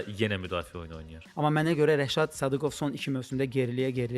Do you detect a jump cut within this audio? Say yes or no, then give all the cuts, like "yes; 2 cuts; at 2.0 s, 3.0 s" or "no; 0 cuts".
yes; 1 cut; at 1.2 s